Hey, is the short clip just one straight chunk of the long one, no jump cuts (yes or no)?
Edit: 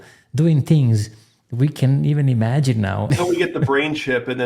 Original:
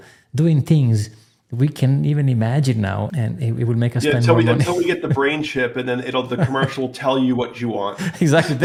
no